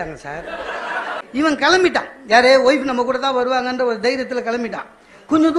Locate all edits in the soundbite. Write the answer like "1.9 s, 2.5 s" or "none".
1.1 s